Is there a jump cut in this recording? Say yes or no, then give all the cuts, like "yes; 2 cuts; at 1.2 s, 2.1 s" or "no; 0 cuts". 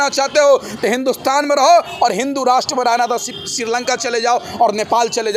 no; 0 cuts